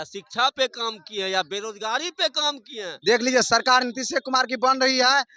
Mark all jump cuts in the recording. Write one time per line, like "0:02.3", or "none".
0:02.9